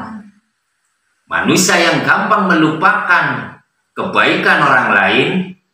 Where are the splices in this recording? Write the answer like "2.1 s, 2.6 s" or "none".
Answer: none